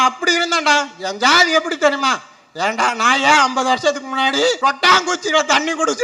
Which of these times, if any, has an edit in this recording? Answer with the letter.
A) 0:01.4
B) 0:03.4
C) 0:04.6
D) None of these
C